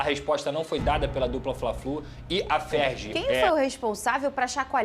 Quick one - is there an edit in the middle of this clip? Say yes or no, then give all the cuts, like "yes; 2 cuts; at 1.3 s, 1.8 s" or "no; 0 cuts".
yes; 1 cut; at 3.3 s